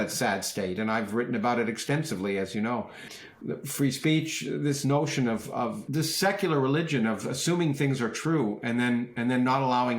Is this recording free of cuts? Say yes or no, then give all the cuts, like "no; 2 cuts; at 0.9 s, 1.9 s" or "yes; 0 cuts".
no; 2 cuts; at 3.2 s, 5.8 s